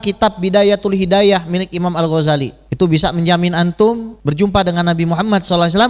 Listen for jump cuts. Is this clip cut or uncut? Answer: cut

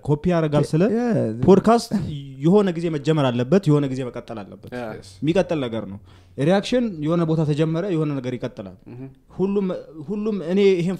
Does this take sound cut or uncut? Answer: uncut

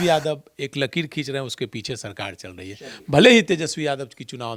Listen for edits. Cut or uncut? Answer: uncut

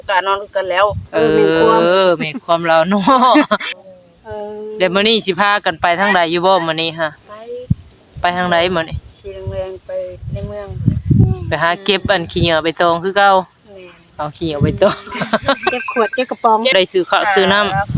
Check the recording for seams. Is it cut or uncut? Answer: cut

